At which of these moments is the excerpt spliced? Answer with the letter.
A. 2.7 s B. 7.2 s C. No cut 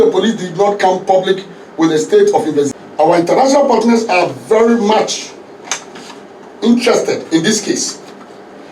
A